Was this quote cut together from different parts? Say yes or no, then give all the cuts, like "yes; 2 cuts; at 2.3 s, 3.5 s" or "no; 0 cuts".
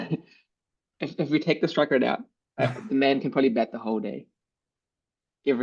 no; 0 cuts